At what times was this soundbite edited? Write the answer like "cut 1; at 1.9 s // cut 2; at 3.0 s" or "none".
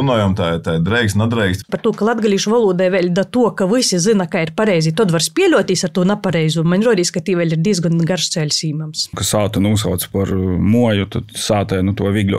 cut 1; at 1.7 s // cut 2; at 9.2 s